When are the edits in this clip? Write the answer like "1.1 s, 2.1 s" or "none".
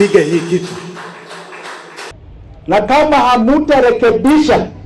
2.1 s